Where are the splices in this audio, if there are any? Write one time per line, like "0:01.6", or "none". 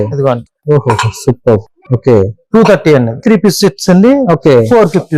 0:03.2